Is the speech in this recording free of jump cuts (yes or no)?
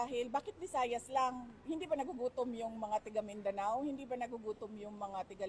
yes